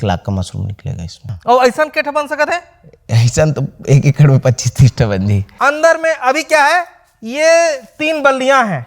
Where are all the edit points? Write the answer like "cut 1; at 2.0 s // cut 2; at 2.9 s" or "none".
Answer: cut 1; at 1.3 s // cut 2; at 5.4 s

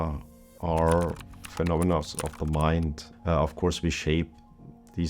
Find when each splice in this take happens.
cut 1; at 3.1 s

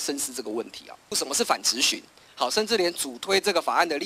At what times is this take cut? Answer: cut 1; at 1.1 s

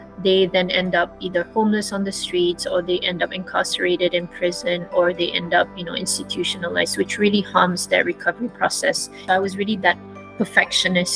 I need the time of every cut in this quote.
cut 1; at 9.1 s

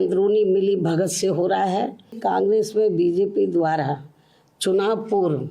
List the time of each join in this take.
cut 1; at 2.2 s

